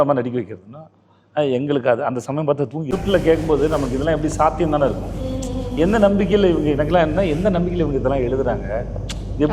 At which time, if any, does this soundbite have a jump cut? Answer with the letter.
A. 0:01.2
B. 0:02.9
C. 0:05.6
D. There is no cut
B